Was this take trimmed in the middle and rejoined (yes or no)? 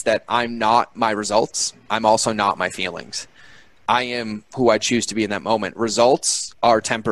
no